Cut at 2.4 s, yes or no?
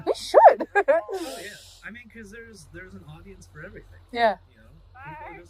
no